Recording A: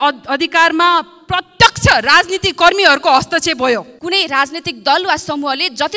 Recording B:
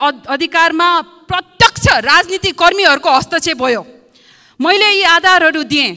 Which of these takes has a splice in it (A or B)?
A